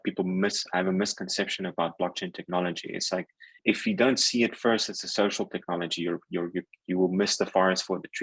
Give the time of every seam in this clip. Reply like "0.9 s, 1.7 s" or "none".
3.6 s